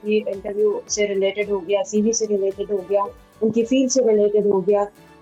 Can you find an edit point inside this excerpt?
no; 0 cuts

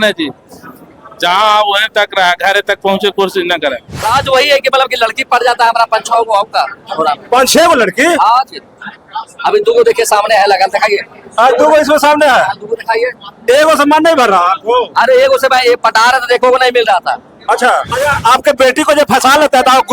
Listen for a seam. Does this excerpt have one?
yes; 2 cuts; at 4.1 s, 17.9 s

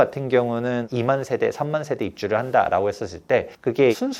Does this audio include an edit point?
no; 0 cuts

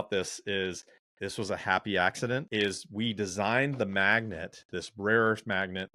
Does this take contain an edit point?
yes; 1 cut; at 2.5 s

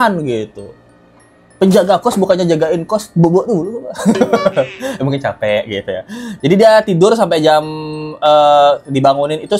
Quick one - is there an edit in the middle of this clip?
no; 0 cuts

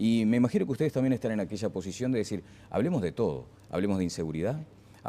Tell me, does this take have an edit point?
yes; 1 cut; at 3.8 s

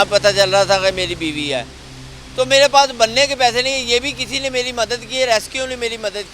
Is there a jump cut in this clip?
yes; 1 cut; at 1.8 s

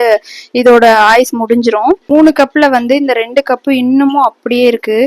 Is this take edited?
yes; 1 cut; at 2.0 s

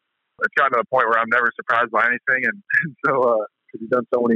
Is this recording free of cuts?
yes; 0 cuts

